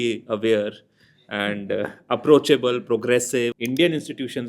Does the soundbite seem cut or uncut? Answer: cut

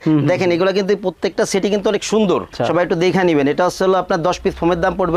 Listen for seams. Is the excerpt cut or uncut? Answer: cut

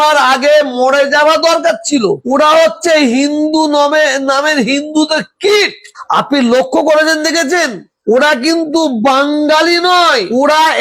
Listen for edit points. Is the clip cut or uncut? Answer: uncut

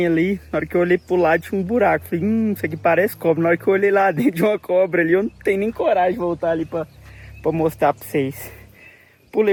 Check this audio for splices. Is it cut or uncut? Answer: uncut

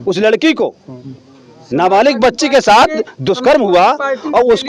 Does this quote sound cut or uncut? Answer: uncut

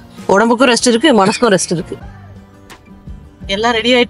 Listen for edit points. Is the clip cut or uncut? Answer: cut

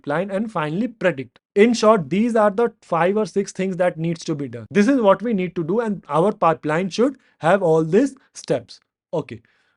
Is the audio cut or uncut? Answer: uncut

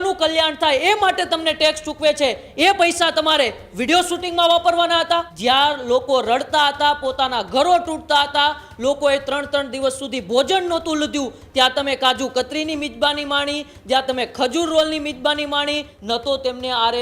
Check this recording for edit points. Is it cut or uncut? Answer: cut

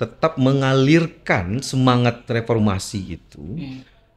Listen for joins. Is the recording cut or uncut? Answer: uncut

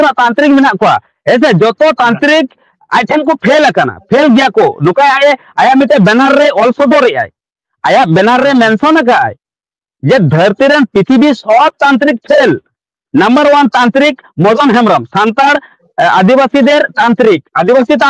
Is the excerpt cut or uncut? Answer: uncut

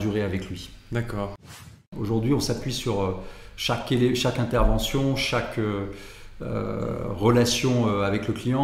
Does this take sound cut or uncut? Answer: cut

